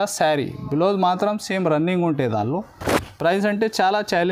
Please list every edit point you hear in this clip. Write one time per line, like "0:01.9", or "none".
none